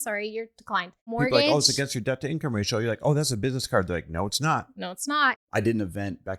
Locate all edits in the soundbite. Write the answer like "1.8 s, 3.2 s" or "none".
1.1 s, 5.3 s